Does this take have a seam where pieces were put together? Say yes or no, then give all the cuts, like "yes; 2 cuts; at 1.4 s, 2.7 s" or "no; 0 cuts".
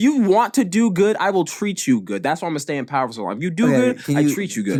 no; 0 cuts